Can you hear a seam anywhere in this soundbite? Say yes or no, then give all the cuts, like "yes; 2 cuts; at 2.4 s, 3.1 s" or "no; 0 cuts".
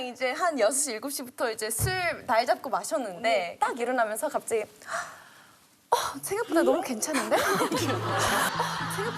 yes; 1 cut; at 3.5 s